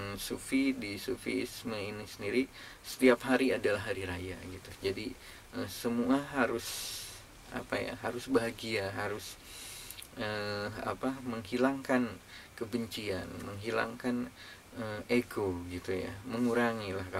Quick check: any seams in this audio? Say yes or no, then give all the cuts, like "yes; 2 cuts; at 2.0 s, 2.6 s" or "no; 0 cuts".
no; 0 cuts